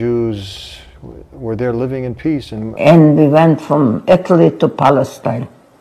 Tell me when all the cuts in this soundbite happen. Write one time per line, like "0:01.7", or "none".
0:02.6

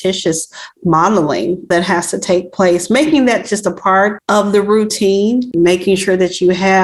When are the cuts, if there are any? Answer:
0:04.2
0:05.5

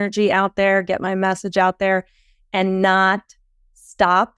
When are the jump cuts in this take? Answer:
none

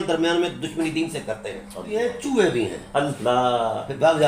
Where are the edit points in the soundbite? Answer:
0:01.9

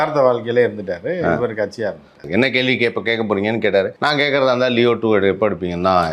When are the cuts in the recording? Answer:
0:02.3
0:03.9

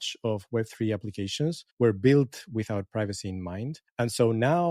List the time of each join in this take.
0:01.7
0:03.8

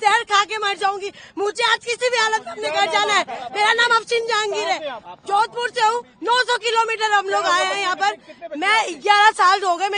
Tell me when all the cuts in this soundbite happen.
none

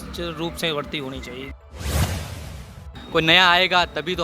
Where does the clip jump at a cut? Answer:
0:01.5
0:02.9

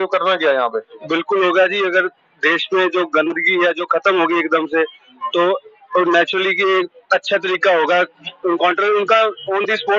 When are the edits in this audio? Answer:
0:00.9

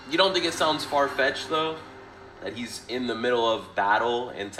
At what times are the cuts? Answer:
none

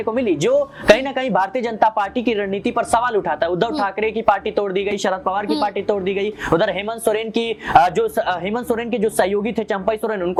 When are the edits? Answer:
none

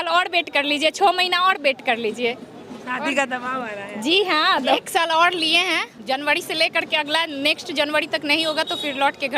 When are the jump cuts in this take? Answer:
0:04.6
0:05.9

